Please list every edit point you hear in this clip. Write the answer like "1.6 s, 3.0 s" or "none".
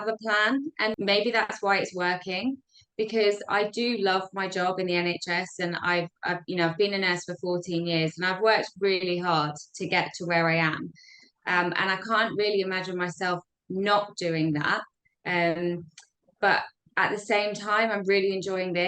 1.0 s